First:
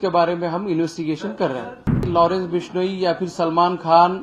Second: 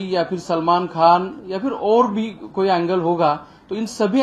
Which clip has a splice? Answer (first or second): first